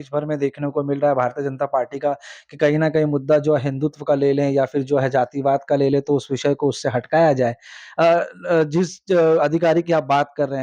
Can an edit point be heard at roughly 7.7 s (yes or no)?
no